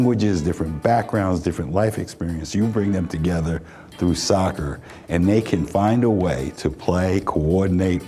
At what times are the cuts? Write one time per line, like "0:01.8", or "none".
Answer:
none